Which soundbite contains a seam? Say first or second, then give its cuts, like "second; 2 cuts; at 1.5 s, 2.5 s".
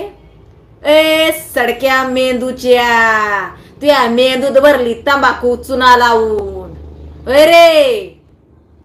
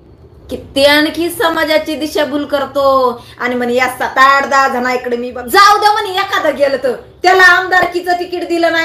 second; 1 cut; at 5.3 s